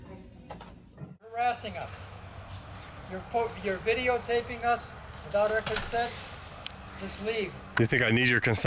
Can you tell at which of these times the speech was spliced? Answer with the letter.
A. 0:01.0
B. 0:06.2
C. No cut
A